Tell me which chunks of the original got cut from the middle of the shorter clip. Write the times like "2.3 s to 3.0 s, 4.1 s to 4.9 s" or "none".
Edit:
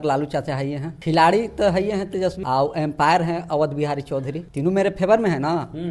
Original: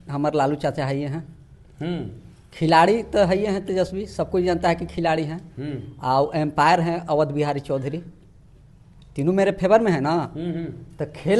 1.2 s to 2.5 s, 3.9 s to 6.0 s, 8.0 s to 9.0 s